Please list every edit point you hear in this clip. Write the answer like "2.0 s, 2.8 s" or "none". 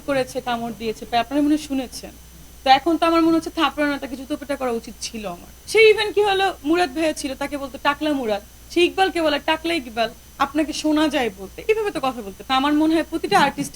5.5 s, 12.5 s